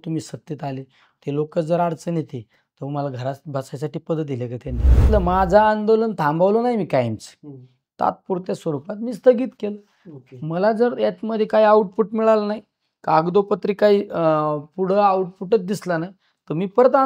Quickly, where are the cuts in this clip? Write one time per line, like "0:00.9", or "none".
0:05.1